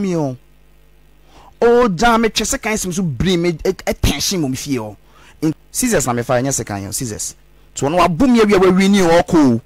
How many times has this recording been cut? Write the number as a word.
one